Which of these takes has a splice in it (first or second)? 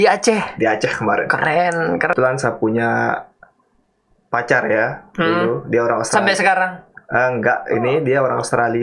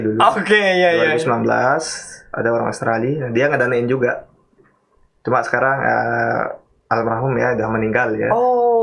first